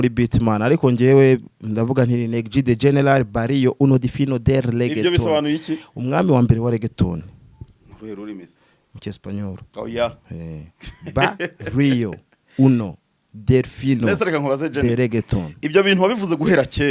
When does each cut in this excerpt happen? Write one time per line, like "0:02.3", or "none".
none